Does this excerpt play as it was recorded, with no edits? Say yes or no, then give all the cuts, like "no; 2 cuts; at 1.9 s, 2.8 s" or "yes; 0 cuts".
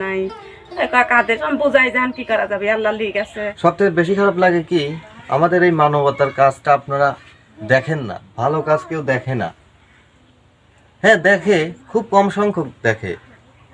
no; 1 cut; at 3.4 s